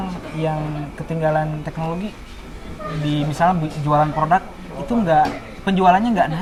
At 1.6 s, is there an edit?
no; 0 cuts

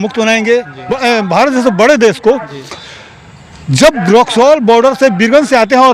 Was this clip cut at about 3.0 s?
no; 1 cut; at 0.9 s

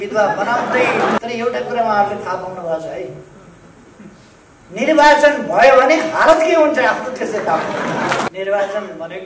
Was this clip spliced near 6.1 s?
no; 2 cuts; at 1.2 s, 8.3 s

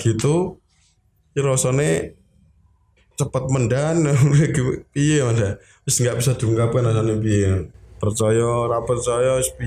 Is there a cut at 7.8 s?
yes; 1 cut; at 7.8 s

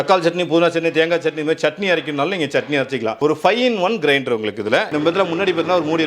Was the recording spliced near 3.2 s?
yes; 2 cuts; at 3.2 s, 4.9 s

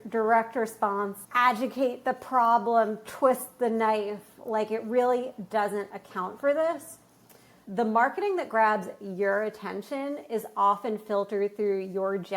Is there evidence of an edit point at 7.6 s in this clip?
yes; 1 cut; at 7.6 s

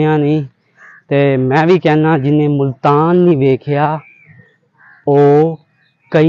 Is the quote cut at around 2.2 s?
no; 0 cuts

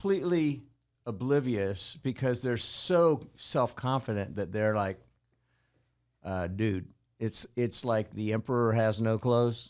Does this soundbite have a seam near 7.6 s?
no; 0 cuts

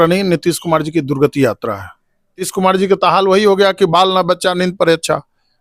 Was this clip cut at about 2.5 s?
yes; 1 cut; at 2.5 s

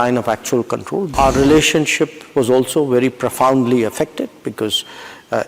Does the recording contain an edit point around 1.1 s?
yes; 1 cut; at 1.1 s

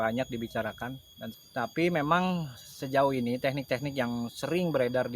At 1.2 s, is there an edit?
yes; 1 cut; at 1.2 s

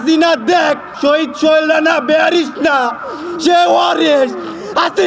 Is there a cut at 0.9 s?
yes; 1 cut; at 0.9 s

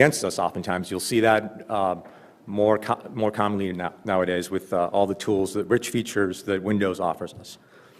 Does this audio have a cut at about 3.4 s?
no; 1 cut; at 1.3 s

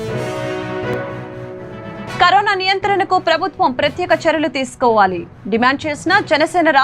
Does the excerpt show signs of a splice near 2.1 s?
yes; 1 cut; at 2.1 s

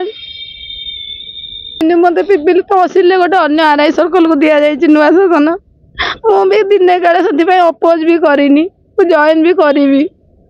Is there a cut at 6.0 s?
no; 1 cut; at 1.8 s

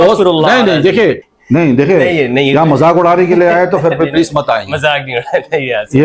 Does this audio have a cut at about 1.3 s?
yes; 1 cut; at 1.3 s

